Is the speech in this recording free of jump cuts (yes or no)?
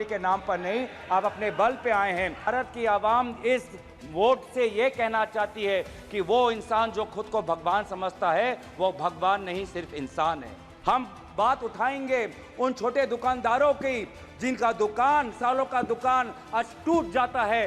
no